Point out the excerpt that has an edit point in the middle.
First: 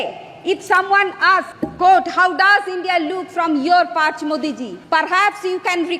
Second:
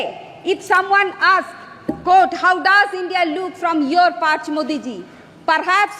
first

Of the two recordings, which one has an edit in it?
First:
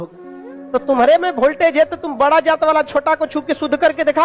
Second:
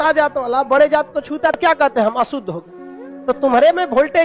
second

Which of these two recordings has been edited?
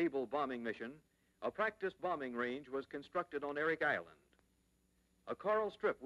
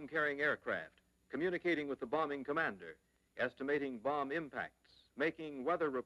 second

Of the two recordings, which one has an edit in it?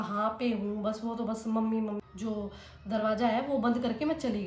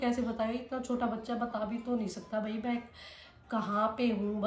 first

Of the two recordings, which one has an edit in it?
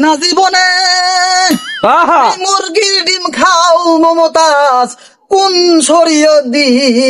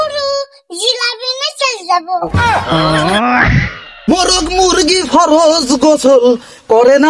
second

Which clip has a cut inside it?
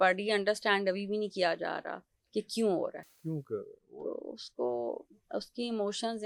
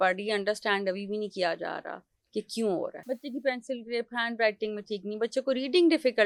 second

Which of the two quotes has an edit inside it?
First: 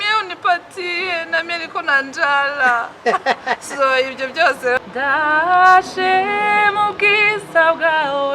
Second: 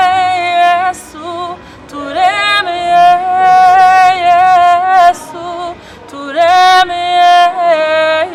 first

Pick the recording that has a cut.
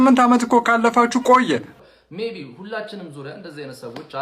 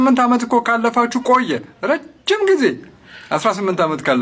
first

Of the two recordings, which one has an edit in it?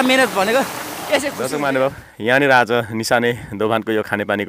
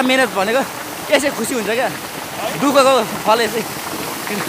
first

